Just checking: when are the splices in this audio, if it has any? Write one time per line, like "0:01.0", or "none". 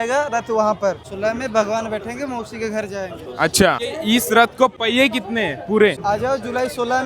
0:06.0